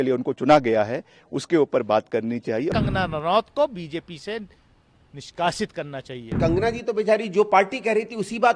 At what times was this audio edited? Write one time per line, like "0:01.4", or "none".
0:02.7
0:06.4